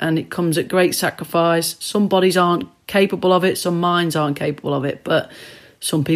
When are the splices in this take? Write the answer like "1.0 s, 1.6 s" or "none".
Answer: none